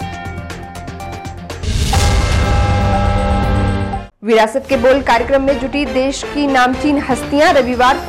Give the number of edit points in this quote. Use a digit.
1